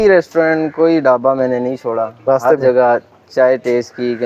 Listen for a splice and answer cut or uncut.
uncut